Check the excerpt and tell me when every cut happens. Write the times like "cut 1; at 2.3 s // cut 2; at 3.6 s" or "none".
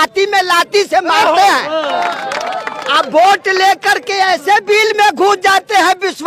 cut 1; at 1.9 s